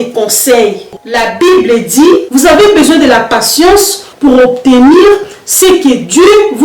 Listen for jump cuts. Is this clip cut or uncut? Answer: cut